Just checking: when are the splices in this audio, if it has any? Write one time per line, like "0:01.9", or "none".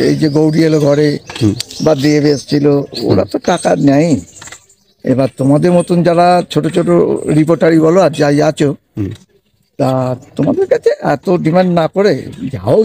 none